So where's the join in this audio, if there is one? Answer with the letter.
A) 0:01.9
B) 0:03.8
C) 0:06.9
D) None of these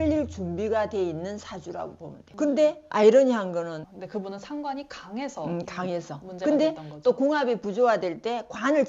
B